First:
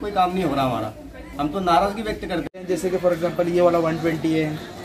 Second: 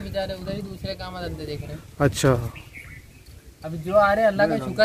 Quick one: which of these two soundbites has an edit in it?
first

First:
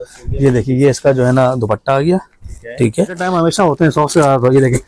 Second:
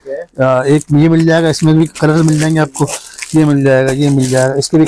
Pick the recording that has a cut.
first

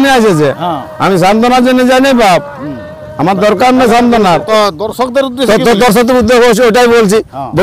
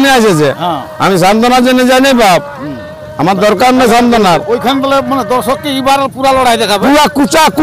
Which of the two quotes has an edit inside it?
first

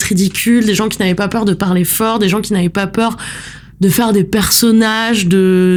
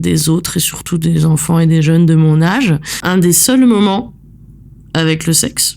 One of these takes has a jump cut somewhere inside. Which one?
second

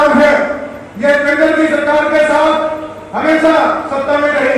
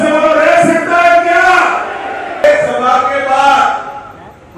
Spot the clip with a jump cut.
second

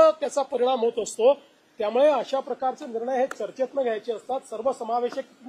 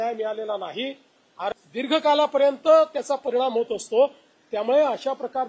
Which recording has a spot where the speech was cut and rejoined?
second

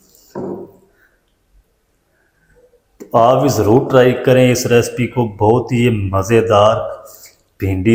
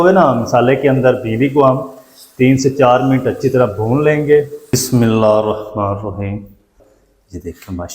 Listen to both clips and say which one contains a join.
second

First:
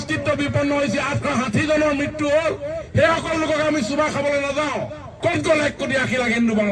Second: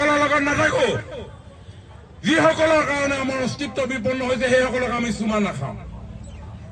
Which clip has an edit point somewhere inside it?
first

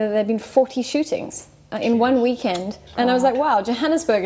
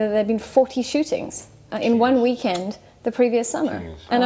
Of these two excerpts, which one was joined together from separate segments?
first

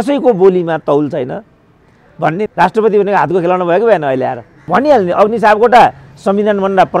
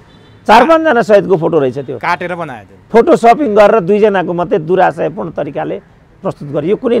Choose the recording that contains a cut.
first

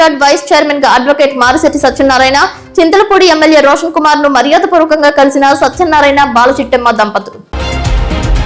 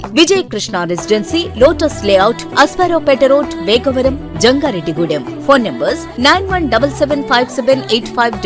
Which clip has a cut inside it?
first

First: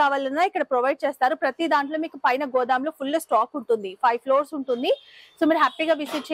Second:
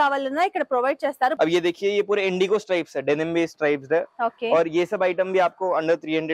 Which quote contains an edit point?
second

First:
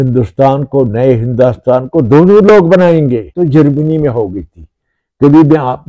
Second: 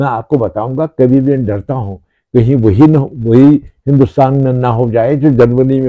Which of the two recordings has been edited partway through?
first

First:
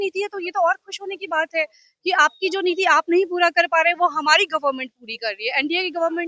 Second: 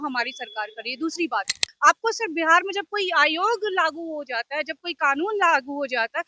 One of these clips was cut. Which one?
second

